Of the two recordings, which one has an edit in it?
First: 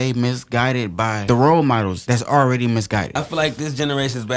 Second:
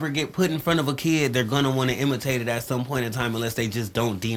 first; 3 cuts; at 1.2 s, 2.0 s, 3.2 s

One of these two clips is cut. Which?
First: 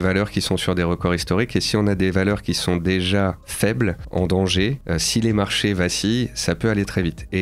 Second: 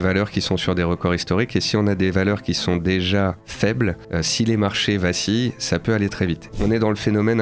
second; 2 cuts; at 4.0 s, 6.5 s

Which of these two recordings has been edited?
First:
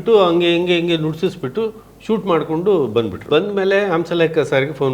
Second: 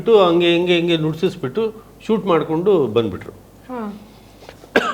first; 1 cut; at 3.3 s

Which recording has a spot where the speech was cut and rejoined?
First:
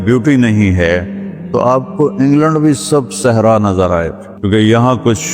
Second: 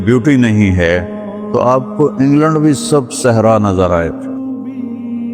first; 1 cut; at 4.2 s

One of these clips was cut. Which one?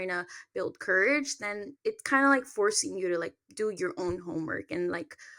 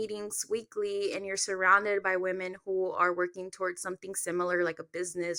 first; 1 cut; at 1.7 s

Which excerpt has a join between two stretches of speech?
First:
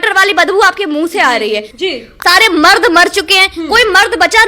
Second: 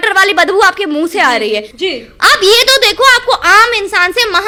first; 1 cut; at 2.1 s

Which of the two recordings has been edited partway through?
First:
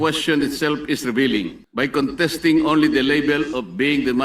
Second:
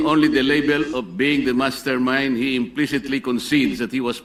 first; 1 cut; at 1.6 s

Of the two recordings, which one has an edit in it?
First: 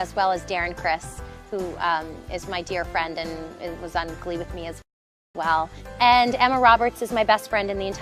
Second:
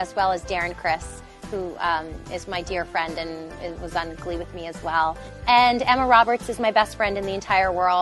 second; 1 cut; at 4.8 s

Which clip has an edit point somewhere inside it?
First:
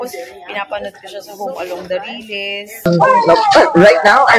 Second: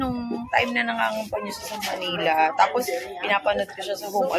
first; 1 cut; at 2.8 s

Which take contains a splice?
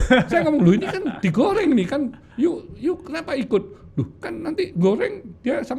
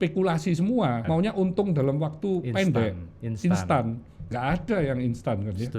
second; 1 cut; at 1.0 s

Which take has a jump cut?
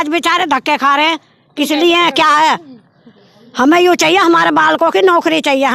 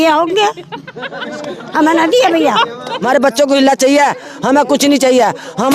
second; 1 cut; at 2.9 s

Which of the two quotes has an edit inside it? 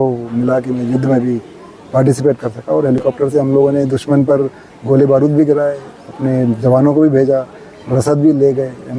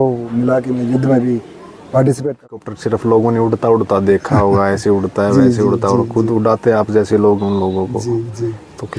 second; 1 cut; at 2.7 s

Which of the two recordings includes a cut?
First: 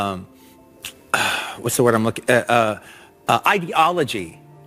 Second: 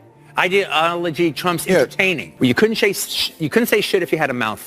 second; 1 cut; at 2.2 s

